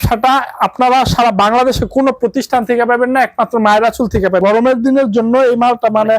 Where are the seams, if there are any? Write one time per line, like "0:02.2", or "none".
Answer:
0:04.4